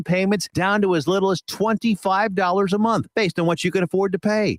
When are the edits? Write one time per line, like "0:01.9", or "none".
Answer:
none

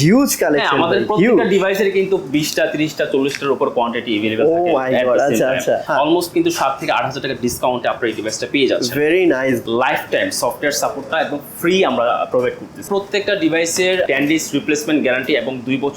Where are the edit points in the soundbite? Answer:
0:05.8
0:09.6
0:12.8
0:14.1

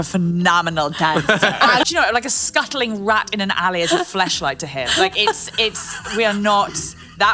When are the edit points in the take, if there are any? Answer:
0:01.8

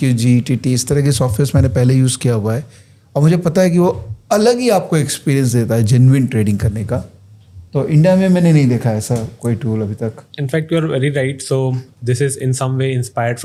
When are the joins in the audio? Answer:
none

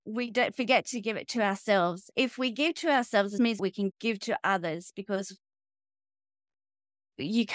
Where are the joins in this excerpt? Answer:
0:02.0
0:03.5

